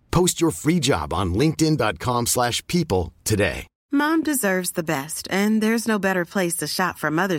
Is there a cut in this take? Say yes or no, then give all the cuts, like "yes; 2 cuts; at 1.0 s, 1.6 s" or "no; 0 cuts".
yes; 1 cut; at 3.7 s